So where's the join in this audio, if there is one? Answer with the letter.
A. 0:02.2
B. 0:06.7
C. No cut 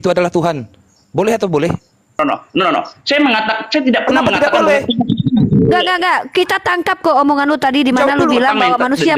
A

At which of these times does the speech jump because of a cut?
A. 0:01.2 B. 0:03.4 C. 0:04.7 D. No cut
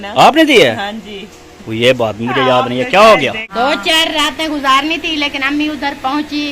B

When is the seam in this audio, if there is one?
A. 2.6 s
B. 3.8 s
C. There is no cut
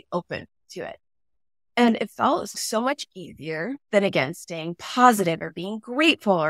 A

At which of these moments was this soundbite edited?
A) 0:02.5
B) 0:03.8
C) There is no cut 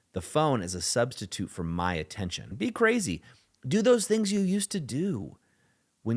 A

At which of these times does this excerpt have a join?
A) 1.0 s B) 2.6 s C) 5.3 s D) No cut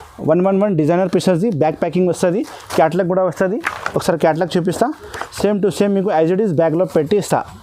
D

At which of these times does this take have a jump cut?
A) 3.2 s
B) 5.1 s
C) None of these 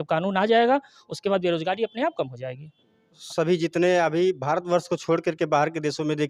A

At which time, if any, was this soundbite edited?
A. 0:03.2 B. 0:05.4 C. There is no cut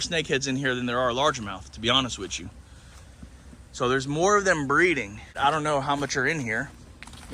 B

